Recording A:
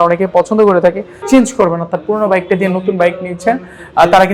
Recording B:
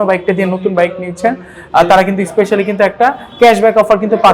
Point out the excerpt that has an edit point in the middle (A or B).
A